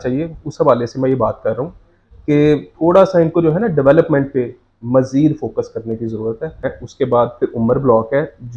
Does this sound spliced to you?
yes; 1 cut; at 6.8 s

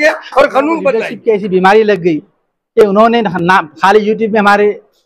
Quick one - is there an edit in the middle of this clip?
yes; 1 cut; at 1.1 s

